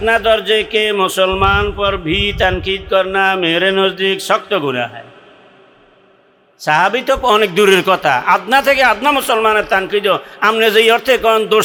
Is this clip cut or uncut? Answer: uncut